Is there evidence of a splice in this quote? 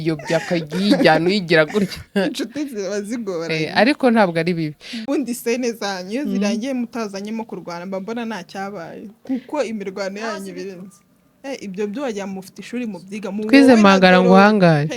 yes; 1 cut; at 5.0 s

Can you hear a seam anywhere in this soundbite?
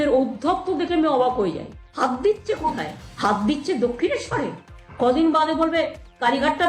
no; 0 cuts

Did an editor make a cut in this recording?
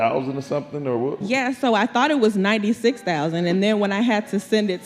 yes; 1 cut; at 1.2 s

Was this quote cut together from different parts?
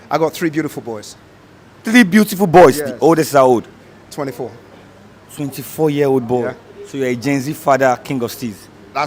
no; 0 cuts

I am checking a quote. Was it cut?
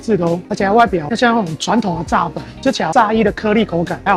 no; 0 cuts

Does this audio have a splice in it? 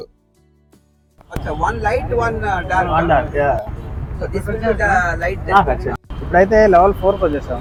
no; 0 cuts

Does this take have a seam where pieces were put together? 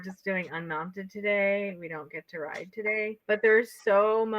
yes; 1 cut; at 3.2 s

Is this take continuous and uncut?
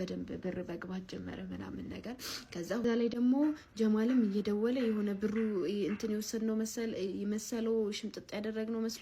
no; 1 cut; at 2.8 s

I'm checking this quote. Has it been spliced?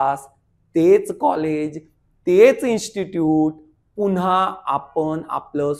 no; 0 cuts

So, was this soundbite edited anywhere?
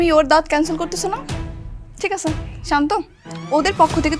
no; 0 cuts

